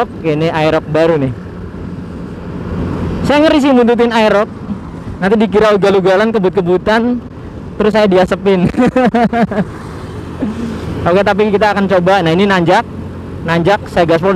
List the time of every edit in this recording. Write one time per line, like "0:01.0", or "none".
none